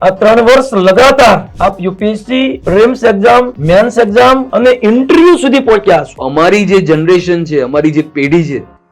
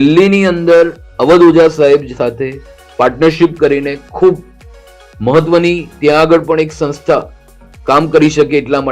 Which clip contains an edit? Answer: first; 5 cuts; at 1.5 s, 2.6 s, 3.6 s, 4.5 s, 6.2 s

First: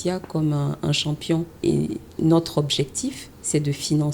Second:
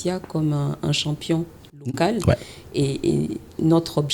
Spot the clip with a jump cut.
first; 1 cut; at 1.6 s

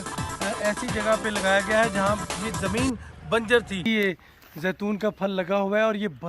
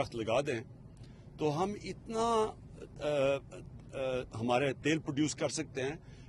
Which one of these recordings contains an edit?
first; 1 cut; at 3.9 s

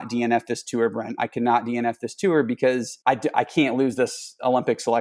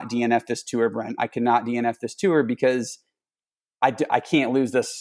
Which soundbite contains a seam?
first; 1 cut; at 2.9 s

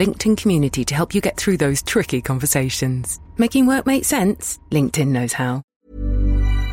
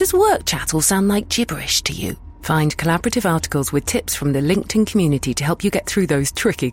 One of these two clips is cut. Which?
first; 1 cut; at 5.7 s

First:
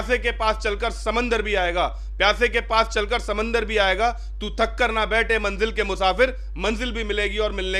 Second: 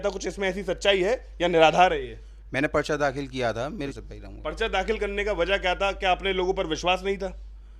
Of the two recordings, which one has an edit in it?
second; 1 cut; at 4.0 s

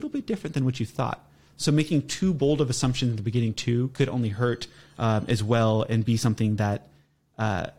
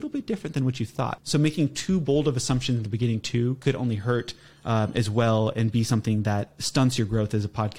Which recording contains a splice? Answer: second; 2 cuts; at 1.2 s, 6.6 s

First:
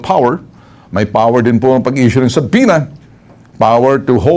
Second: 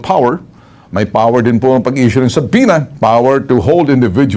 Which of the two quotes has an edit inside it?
second; 1 cut; at 2.9 s

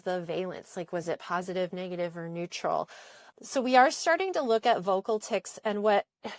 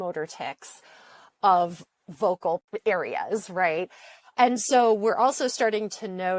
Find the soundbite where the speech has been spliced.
second; 1 cut; at 2.7 s

